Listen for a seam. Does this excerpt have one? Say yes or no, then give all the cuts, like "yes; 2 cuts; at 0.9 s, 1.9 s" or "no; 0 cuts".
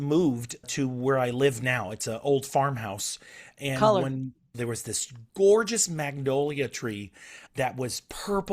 yes; 1 cut; at 4.6 s